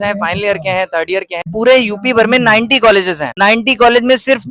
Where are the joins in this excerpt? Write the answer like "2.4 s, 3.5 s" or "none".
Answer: 1.5 s, 3.2 s

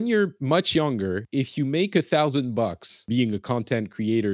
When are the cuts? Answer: 1.2 s, 3.1 s

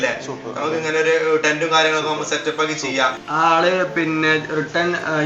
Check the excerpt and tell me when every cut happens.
3.2 s

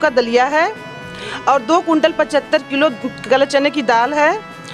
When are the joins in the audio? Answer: none

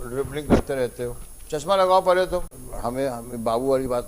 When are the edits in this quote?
2.6 s

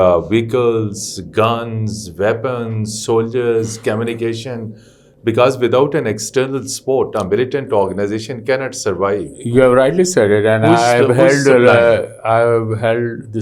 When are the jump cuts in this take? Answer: none

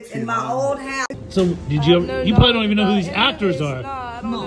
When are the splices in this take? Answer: 1.1 s

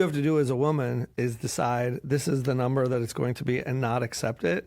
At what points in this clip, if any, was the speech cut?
none

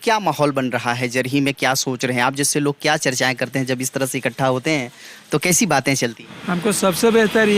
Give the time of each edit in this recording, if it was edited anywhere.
6.3 s

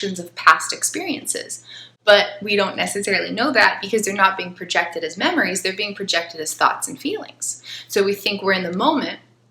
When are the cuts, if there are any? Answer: none

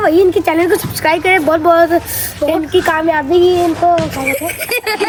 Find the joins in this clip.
none

